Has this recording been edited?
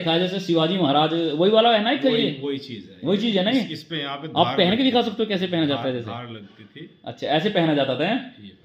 no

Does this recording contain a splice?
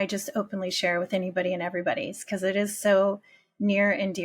no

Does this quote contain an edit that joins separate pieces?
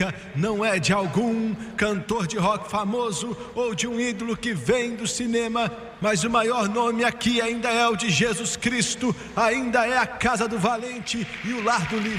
no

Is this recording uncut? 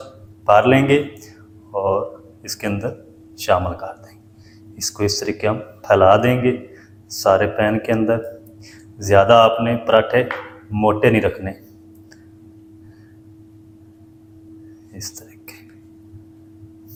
yes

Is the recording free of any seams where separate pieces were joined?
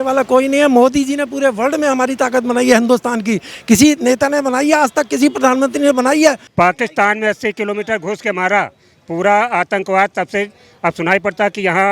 no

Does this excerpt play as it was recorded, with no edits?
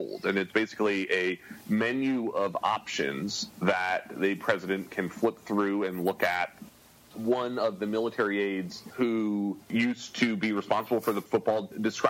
no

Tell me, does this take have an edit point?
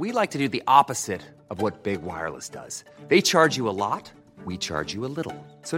no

